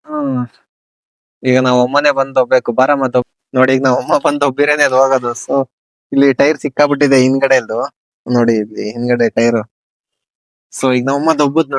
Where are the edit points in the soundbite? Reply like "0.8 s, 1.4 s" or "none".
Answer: 3.2 s